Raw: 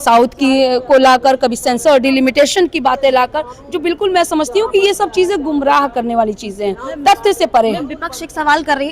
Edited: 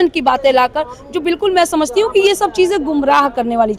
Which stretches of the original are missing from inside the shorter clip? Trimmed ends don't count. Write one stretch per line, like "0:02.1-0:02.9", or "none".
none